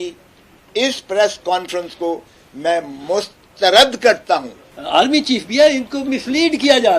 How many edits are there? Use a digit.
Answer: 1